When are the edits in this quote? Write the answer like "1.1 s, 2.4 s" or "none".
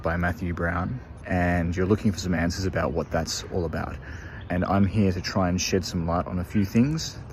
1.1 s, 4.4 s